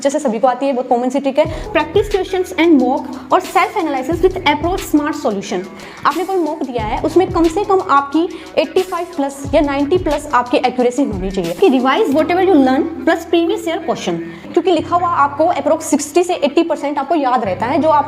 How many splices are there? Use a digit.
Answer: 4